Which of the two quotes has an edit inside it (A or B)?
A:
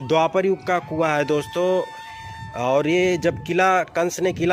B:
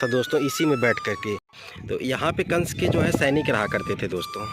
B